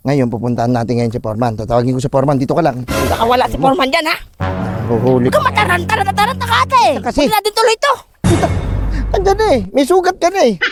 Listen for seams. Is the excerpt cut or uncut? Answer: uncut